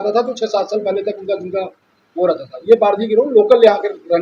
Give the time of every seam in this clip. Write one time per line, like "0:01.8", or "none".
none